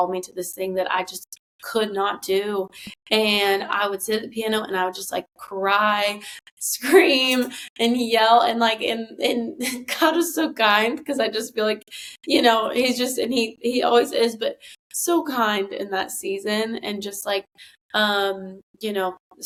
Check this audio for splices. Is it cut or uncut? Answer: uncut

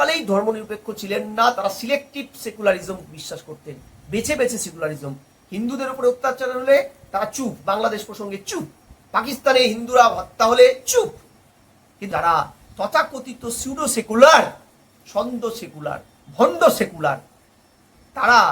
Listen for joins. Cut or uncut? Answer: cut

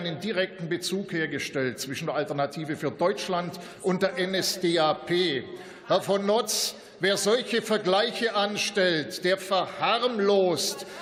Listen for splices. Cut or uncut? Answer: uncut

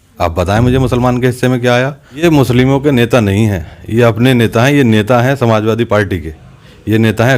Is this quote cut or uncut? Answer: cut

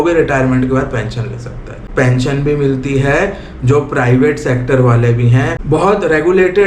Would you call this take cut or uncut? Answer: cut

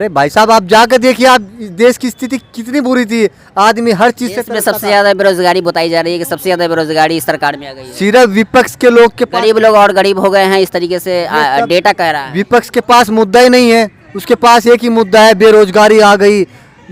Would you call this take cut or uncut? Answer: uncut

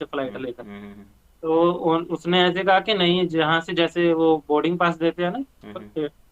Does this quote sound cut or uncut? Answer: uncut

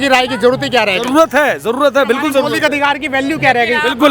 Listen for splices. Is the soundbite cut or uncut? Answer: uncut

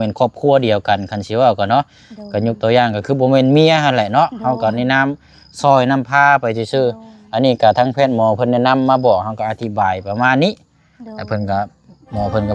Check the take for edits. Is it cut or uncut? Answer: uncut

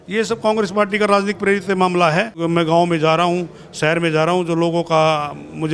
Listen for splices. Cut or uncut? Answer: cut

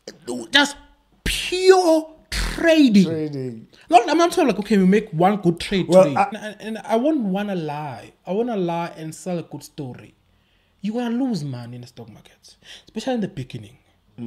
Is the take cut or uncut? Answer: cut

